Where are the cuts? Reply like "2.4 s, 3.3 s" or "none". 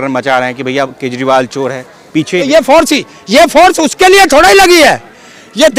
2.5 s

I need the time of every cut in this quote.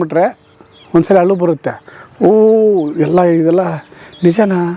none

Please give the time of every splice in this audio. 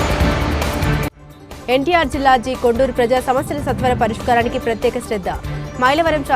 1.0 s

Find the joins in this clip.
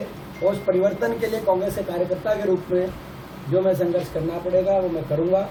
none

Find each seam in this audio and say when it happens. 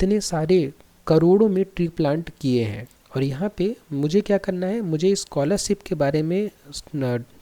2.9 s

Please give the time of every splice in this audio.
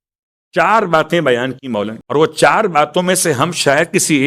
2.0 s

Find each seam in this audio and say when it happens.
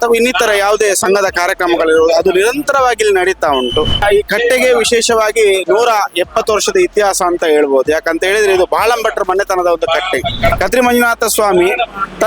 4.0 s, 10.6 s

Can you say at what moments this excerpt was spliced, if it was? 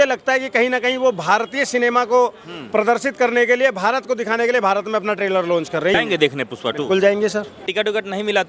5.9 s, 7.7 s

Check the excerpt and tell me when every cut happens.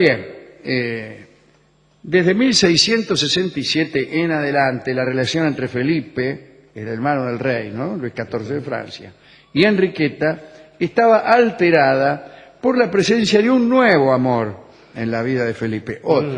none

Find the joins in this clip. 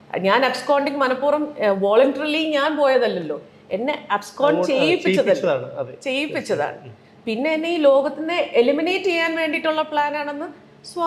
none

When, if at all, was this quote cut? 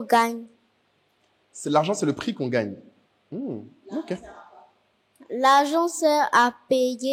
none

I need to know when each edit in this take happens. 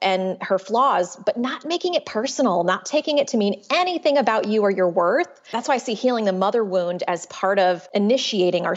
5.4 s, 7.8 s

